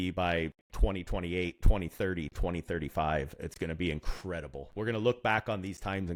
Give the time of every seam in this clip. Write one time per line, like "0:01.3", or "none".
none